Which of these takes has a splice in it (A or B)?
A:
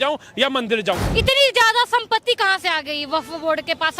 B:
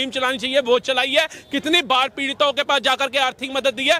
A